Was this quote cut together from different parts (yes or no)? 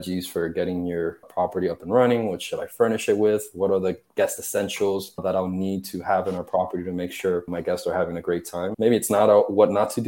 yes